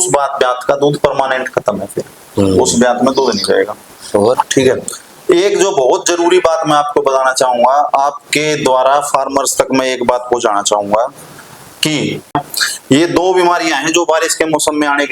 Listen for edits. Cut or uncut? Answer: cut